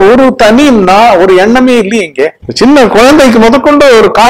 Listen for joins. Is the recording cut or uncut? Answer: cut